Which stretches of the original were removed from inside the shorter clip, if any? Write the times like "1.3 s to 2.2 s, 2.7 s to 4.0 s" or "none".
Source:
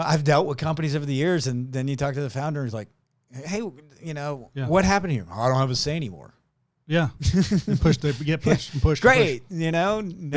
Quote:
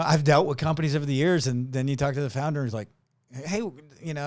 none